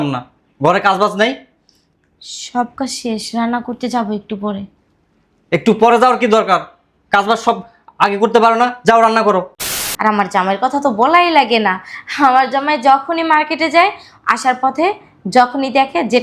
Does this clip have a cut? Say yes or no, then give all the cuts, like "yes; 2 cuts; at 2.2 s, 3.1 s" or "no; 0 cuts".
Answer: yes; 1 cut; at 9.9 s